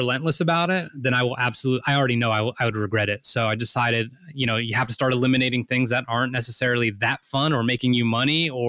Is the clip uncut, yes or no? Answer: yes